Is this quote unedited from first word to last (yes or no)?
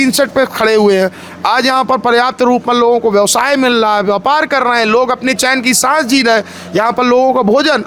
yes